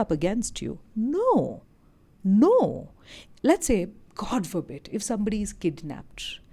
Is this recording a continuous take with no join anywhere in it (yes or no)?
yes